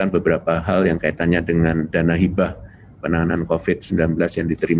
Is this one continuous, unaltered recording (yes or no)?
yes